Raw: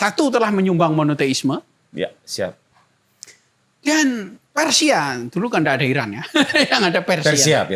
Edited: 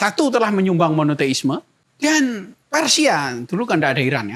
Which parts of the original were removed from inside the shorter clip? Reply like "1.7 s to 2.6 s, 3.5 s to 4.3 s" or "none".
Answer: 1.8 s to 3.6 s